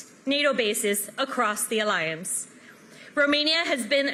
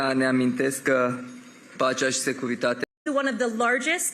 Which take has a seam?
second; 1 cut; at 2.8 s

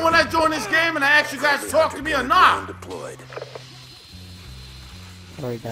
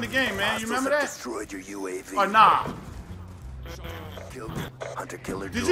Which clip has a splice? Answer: second; 1 cut; at 4.7 s

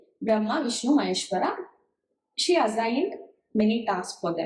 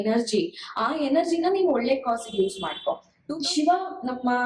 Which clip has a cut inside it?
second; 1 cut; at 3.1 s

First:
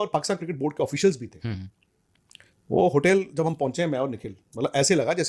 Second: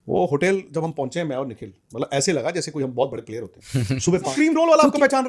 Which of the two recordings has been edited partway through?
second; 1 cut; at 4.3 s

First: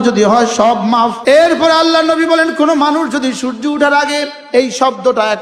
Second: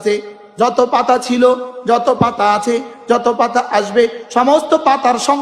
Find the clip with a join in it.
first; 2 cuts; at 1.2 s, 4.4 s

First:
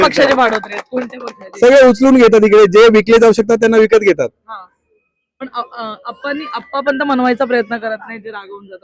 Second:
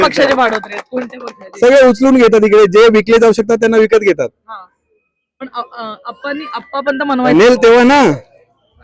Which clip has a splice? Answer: second; 1 cut; at 7.3 s

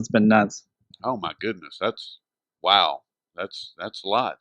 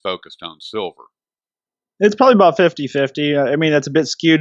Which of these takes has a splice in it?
first; 1 cut; at 2.5 s

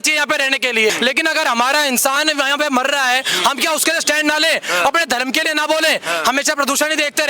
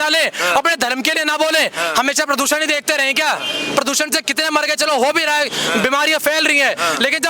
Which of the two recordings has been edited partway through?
first; 1 cut; at 0.9 s

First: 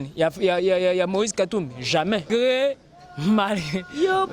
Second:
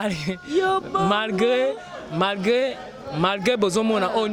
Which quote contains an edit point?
first; 1 cut; at 2.2 s

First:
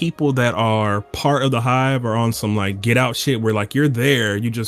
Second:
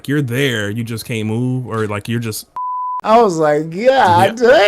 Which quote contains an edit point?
second; 1 cut; at 2.9 s

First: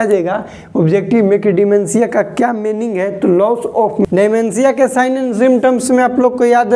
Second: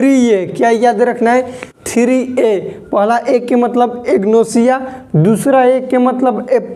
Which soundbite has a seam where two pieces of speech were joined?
first; 1 cut; at 4.0 s

